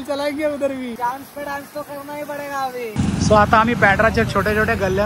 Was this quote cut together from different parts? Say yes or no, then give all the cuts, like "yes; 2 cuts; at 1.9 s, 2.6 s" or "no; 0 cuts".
yes; 2 cuts; at 1.0 s, 2.9 s